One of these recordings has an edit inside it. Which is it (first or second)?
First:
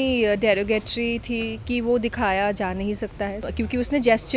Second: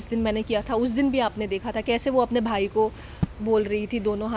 first